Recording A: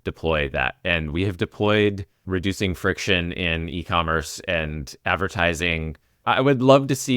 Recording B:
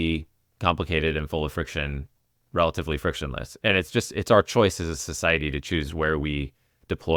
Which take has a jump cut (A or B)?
A